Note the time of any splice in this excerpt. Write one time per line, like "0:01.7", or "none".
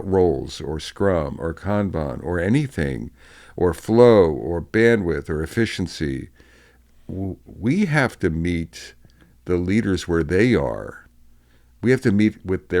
none